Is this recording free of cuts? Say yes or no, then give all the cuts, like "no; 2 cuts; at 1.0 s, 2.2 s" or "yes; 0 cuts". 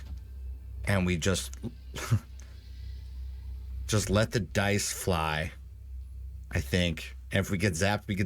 yes; 0 cuts